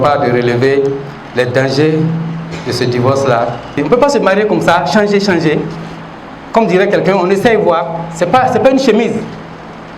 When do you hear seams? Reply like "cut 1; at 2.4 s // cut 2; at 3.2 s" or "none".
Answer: cut 1; at 3.8 s